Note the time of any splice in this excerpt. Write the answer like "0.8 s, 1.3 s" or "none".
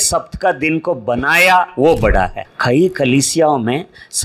2.5 s